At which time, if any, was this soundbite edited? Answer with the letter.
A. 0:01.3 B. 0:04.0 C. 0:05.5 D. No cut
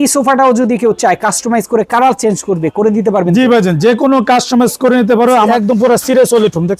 C